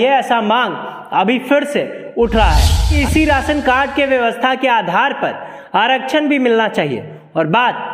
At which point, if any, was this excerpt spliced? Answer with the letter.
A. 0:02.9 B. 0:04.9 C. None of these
A